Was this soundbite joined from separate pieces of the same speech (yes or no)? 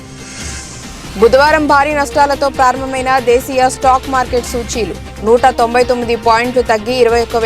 yes